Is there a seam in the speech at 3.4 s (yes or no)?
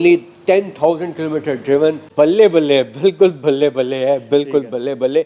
no